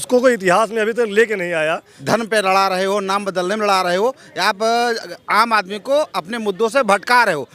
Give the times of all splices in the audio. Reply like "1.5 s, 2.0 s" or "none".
1.9 s